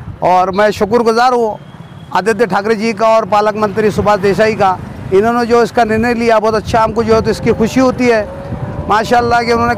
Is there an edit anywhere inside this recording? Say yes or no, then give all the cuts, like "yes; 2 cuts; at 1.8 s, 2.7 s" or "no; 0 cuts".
no; 0 cuts